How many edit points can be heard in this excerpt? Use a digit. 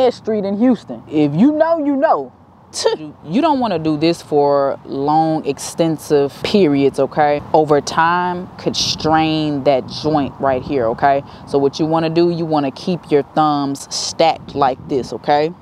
4